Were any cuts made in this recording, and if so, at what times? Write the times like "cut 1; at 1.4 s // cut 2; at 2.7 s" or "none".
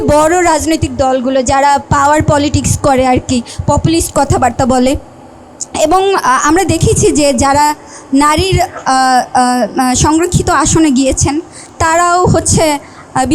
none